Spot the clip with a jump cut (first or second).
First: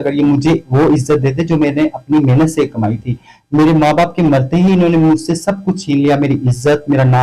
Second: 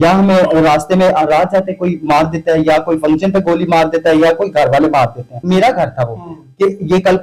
second